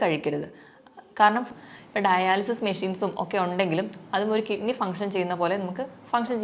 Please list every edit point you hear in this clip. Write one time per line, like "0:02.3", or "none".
0:01.5